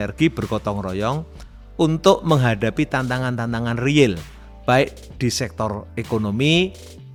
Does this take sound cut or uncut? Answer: uncut